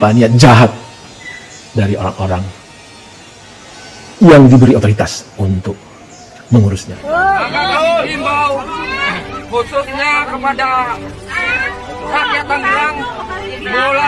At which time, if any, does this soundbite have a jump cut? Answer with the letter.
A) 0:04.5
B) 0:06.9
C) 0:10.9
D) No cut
B